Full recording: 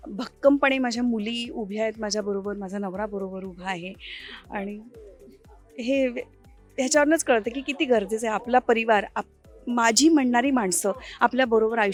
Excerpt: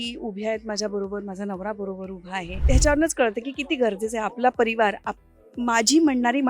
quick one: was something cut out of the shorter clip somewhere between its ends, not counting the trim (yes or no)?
yes